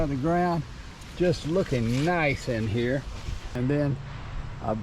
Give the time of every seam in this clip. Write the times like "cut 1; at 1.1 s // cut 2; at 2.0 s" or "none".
cut 1; at 3.4 s